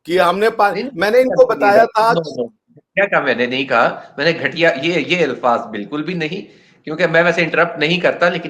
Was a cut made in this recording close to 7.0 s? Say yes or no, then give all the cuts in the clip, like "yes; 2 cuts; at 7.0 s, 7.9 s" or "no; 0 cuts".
no; 0 cuts